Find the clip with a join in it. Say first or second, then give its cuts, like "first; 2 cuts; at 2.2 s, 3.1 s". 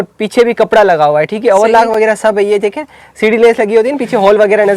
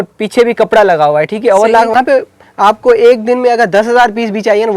second; 1 cut; at 1.9 s